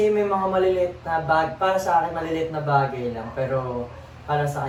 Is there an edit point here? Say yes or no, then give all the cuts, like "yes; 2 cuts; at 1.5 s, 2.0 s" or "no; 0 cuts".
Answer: no; 0 cuts